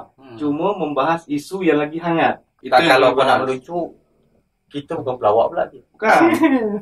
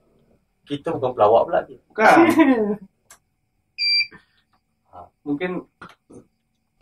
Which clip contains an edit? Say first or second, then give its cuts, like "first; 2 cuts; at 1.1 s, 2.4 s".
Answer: first; 1 cut; at 2.5 s